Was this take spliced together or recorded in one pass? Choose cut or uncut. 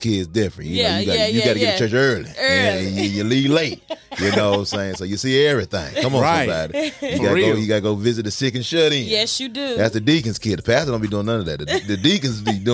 uncut